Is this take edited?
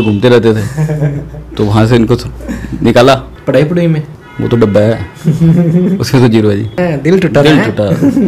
yes; 2 cuts; at 3.3 s, 6.7 s

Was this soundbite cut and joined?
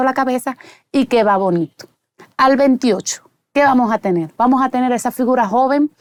no; 0 cuts

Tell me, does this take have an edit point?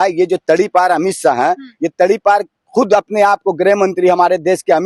no; 0 cuts

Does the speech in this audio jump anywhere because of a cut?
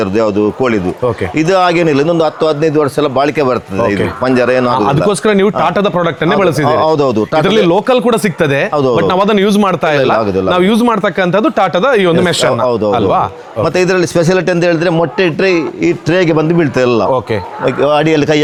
no; 0 cuts

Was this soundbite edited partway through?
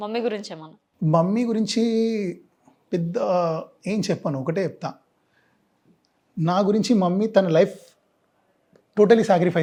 no; 0 cuts

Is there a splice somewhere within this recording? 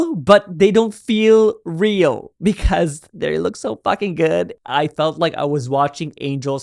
yes; 1 cut; at 4.6 s

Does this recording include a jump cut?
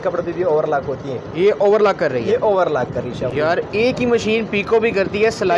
no; 0 cuts

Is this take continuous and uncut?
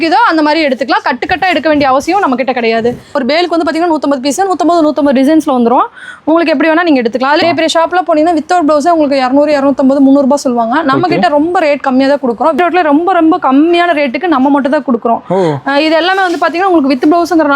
no; 3 cuts; at 3.2 s, 7.4 s, 12.6 s

